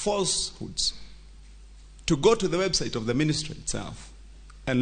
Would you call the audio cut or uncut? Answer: uncut